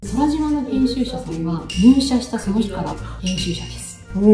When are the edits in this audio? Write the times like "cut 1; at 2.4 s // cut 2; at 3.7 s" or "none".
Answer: none